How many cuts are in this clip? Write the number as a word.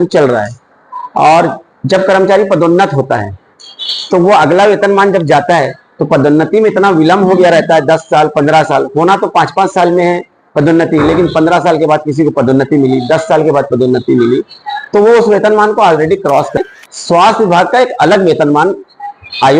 one